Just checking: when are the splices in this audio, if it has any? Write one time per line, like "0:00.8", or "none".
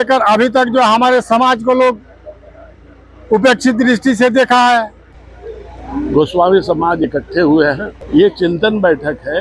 0:05.0
0:07.9